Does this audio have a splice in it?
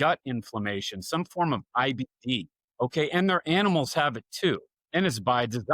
yes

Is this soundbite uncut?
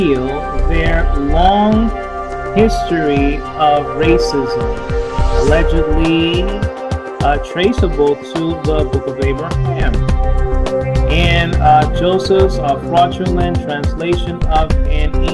no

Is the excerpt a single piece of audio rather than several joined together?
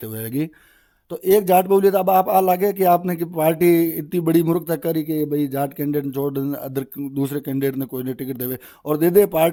yes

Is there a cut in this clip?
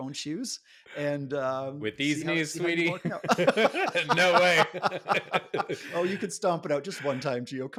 no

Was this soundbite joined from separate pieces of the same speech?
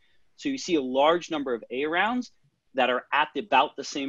no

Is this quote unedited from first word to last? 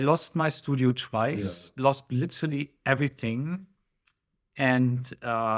yes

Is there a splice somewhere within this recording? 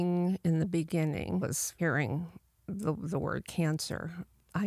yes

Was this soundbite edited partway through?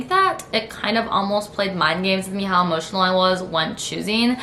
no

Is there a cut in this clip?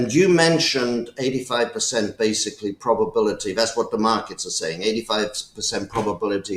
no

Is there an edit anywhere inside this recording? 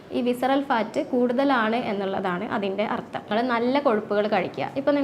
yes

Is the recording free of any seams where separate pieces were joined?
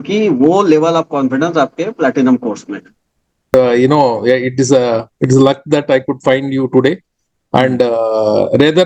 no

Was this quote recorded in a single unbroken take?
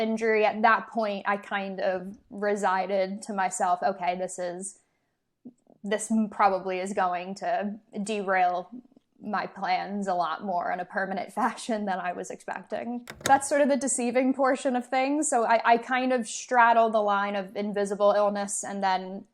no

